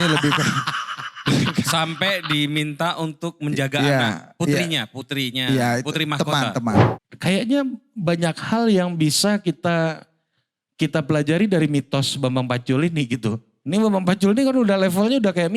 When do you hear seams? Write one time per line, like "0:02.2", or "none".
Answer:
0:06.9